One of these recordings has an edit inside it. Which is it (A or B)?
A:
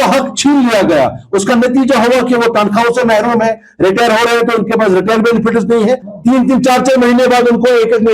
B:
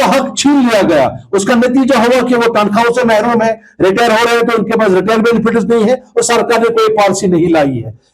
A